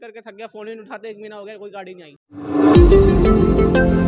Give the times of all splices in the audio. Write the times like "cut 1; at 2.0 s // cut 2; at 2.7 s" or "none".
cut 1; at 2.2 s